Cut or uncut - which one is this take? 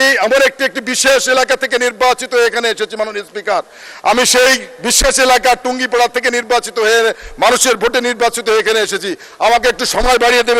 uncut